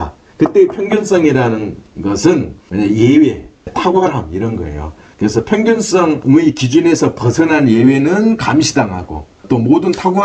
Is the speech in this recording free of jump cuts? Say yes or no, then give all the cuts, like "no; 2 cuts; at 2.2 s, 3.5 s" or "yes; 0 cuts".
no; 3 cuts; at 2.6 s, 3.7 s, 6.2 s